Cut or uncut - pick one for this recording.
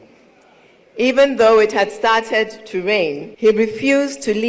cut